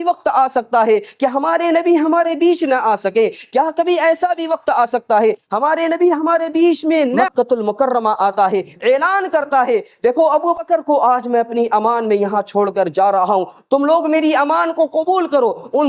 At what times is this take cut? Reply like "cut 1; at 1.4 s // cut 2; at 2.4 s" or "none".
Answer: cut 1; at 7.2 s